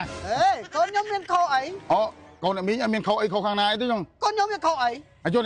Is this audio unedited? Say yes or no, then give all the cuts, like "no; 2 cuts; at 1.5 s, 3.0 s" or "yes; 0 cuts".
yes; 0 cuts